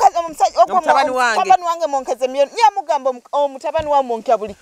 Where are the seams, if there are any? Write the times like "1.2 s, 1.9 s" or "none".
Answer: none